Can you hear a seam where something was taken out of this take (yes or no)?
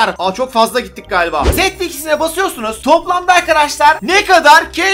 yes